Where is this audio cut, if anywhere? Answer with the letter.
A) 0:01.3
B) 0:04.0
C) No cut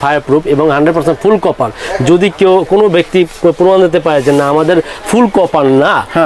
C